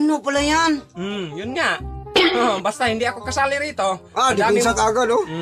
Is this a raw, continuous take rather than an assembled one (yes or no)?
yes